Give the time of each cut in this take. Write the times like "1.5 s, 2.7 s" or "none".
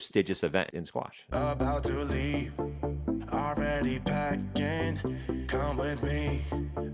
1.2 s